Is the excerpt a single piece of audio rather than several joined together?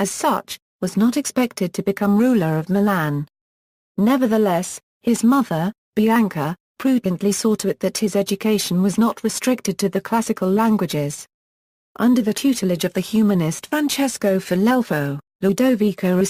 no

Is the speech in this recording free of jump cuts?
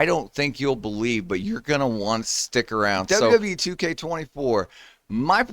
no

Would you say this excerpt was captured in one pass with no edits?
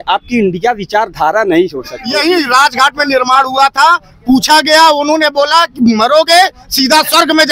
no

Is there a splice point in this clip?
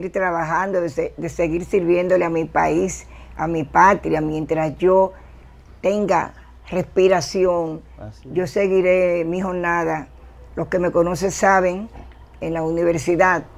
no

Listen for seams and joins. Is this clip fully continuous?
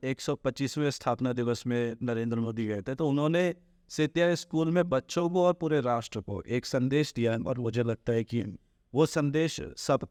yes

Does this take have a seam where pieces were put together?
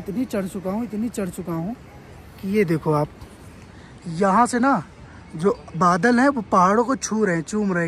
no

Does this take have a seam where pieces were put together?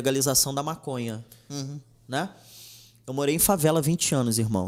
no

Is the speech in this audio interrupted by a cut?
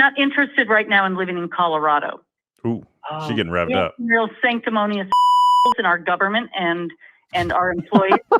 no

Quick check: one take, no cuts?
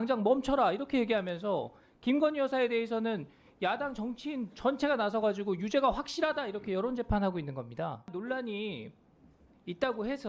no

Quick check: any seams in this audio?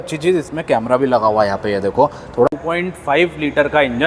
yes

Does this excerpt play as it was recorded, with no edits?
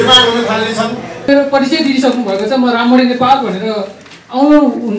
no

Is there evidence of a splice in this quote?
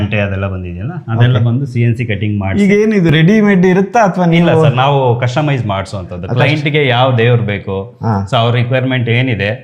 no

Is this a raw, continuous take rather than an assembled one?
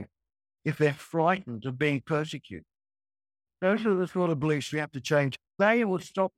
no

